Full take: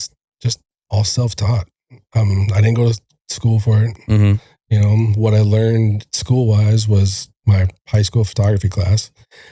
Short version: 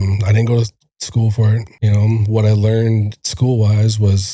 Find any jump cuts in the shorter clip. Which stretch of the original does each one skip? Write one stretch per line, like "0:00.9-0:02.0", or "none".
0:04.0-0:04.6